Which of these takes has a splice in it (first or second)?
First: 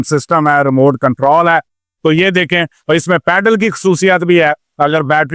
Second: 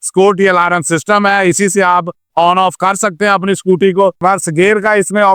second